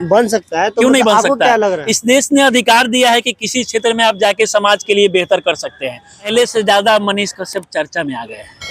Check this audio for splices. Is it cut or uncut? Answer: cut